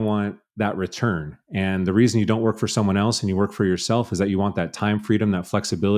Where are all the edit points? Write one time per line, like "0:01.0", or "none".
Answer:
none